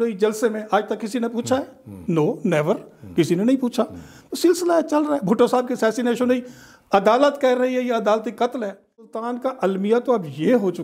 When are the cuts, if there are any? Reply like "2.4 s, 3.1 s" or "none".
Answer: 9.1 s